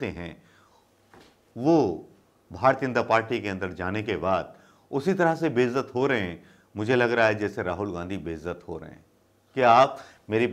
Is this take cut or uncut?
uncut